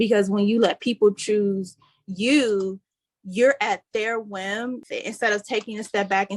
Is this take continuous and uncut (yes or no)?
no